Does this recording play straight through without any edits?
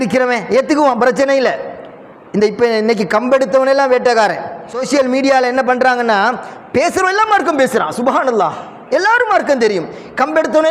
no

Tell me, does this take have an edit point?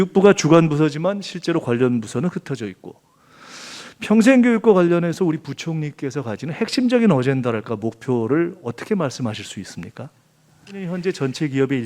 yes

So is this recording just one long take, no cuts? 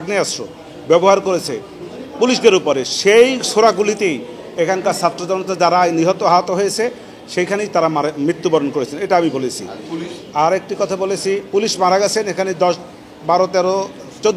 yes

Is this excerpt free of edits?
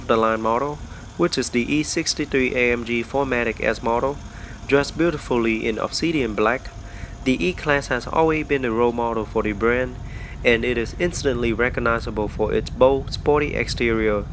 yes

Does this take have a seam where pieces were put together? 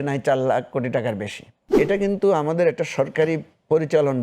yes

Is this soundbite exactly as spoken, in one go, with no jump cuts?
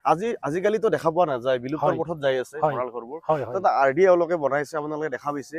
yes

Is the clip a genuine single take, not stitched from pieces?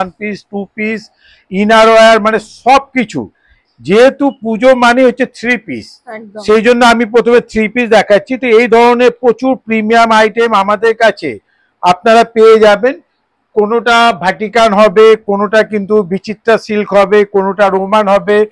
yes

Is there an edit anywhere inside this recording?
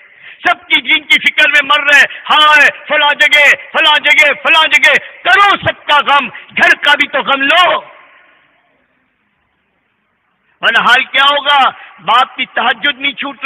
no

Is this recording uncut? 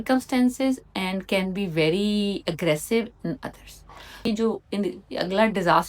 no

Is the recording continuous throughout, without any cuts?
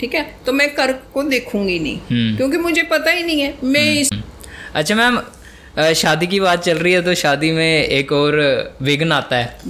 no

